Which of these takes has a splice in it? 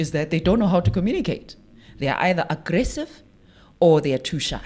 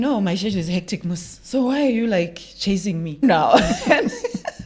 second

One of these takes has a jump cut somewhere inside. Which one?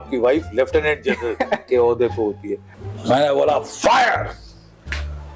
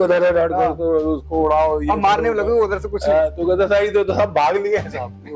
first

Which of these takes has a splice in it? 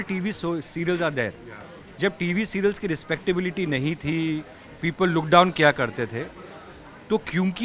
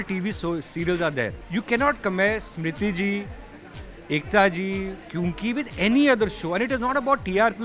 second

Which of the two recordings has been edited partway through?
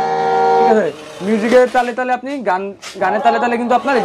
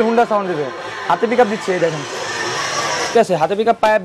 second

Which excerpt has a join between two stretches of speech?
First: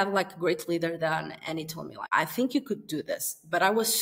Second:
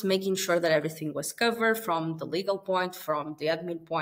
first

